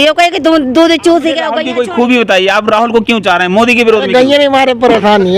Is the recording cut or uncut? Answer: cut